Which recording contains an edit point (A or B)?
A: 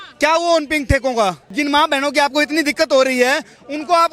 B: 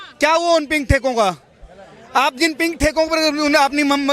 A